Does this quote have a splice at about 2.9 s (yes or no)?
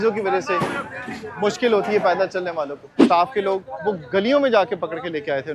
yes